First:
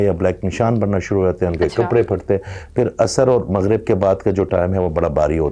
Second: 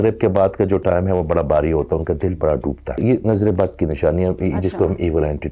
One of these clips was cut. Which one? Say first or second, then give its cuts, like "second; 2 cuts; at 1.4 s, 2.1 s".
second; 1 cut; at 3.0 s